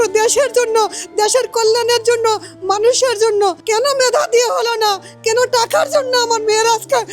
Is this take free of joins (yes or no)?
no